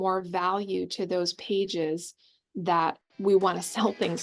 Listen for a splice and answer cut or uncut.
cut